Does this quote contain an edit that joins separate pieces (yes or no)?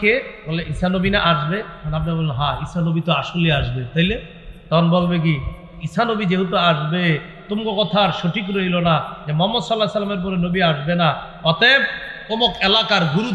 no